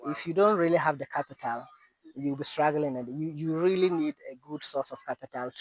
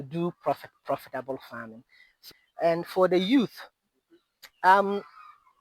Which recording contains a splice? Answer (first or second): second